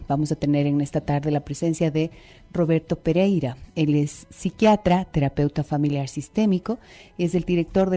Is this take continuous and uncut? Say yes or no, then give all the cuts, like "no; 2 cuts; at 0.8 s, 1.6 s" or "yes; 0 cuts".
yes; 0 cuts